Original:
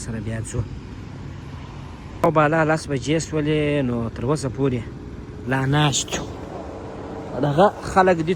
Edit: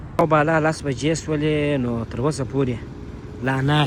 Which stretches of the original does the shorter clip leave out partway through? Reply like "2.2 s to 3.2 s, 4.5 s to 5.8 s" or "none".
none